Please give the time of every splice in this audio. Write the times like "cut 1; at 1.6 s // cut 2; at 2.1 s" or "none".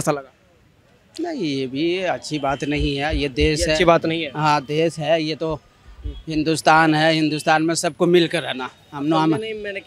none